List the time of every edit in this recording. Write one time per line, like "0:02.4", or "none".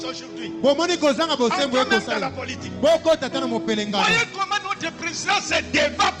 none